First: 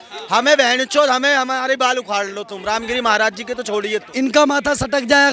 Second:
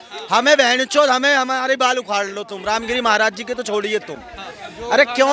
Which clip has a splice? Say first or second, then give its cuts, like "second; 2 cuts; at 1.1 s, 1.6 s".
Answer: first; 1 cut; at 4.1 s